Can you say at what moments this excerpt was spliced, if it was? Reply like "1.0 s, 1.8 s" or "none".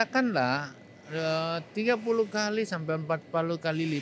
none